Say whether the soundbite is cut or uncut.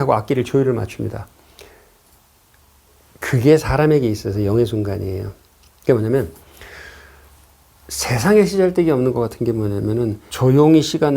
cut